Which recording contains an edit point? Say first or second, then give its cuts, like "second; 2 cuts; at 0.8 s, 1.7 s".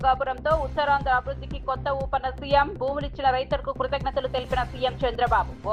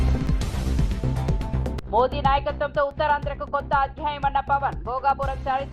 second; 1 cut; at 1.8 s